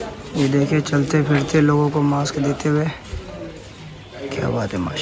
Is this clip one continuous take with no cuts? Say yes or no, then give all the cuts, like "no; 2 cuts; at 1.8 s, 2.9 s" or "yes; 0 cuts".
yes; 0 cuts